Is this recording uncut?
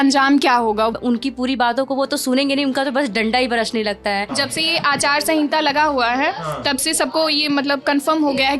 no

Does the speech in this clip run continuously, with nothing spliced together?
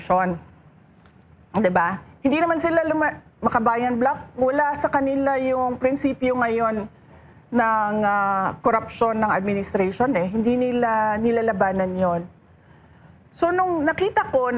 yes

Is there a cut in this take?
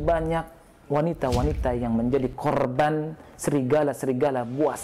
no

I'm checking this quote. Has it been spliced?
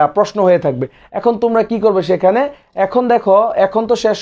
no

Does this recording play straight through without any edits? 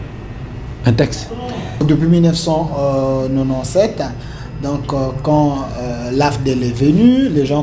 no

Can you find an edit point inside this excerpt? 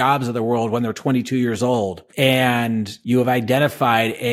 yes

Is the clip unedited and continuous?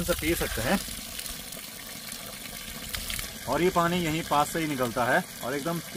yes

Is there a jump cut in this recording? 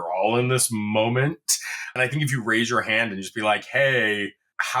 yes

